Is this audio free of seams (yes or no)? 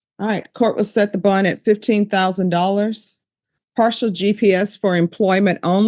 yes